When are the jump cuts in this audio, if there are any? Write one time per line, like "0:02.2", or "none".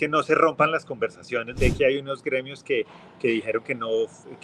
0:01.5